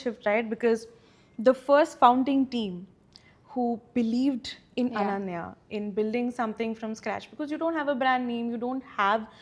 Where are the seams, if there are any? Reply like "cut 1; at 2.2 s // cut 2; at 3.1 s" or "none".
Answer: none